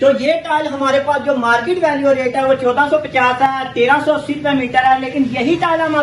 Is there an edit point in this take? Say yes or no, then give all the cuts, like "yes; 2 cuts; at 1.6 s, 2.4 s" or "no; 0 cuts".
no; 0 cuts